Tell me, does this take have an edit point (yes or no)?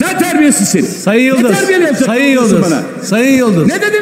no